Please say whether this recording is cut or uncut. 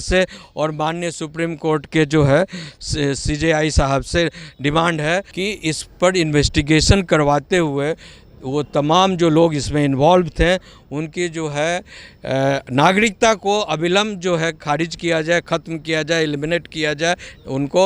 cut